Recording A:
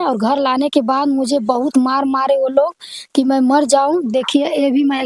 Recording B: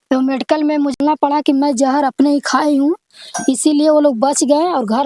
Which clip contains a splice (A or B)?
B